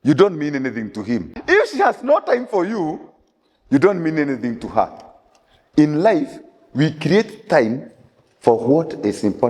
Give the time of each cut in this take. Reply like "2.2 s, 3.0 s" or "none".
1.3 s